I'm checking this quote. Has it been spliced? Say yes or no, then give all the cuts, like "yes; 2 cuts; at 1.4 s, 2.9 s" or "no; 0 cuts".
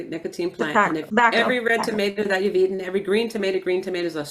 yes; 1 cut; at 1.1 s